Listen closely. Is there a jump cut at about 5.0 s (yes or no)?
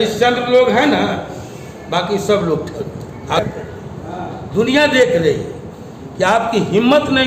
no